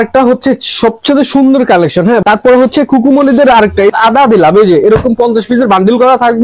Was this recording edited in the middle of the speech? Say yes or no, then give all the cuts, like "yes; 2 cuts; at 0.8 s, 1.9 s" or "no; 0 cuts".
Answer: yes; 2 cuts; at 2.2 s, 3.9 s